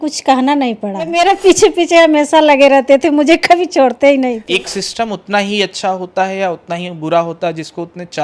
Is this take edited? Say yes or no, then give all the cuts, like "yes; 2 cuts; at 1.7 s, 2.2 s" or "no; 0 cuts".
yes; 2 cuts; at 1.0 s, 4.5 s